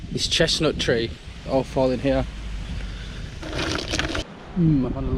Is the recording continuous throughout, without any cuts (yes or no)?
no